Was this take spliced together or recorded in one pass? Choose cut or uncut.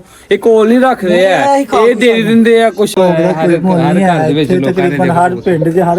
cut